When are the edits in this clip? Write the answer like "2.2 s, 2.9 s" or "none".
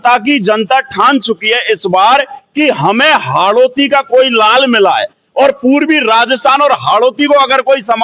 none